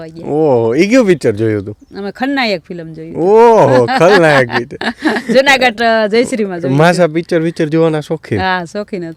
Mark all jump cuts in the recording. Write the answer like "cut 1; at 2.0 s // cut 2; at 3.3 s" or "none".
none